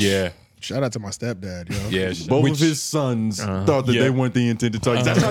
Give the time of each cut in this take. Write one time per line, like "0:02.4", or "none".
0:02.2